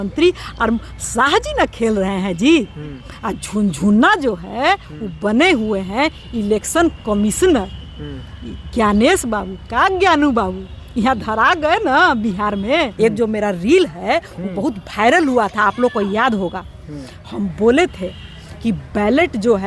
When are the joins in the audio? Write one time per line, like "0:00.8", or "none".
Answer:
0:12.9

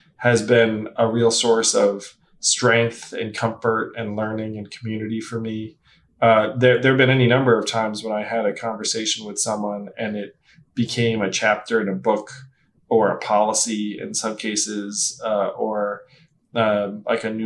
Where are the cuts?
none

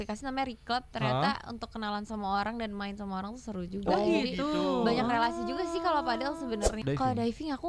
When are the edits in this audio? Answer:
0:06.7

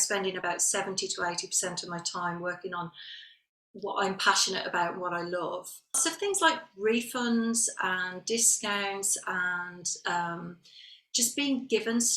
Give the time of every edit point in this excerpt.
0:06.0

